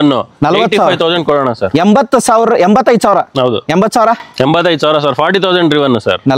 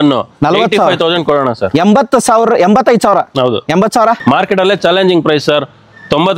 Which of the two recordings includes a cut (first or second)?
second